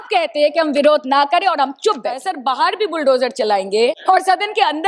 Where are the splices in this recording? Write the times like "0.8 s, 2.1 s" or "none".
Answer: 2.3 s, 4.0 s